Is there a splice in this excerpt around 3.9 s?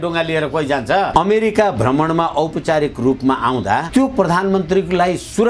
yes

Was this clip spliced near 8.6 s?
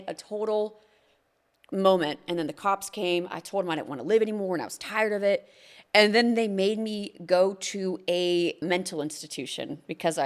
yes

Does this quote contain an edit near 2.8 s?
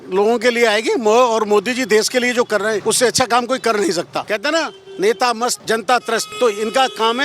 yes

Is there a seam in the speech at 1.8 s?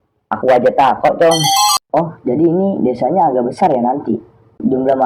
yes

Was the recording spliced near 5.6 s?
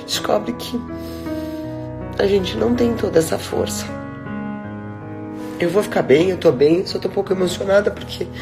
yes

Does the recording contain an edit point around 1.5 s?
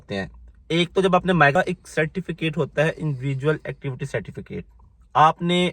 yes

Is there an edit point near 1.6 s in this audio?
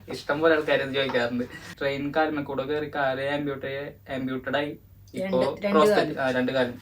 yes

